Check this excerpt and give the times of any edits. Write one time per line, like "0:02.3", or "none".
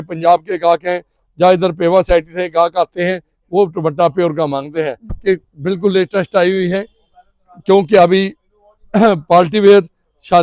0:05.2